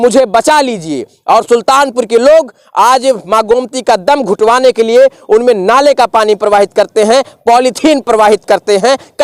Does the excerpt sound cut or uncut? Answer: uncut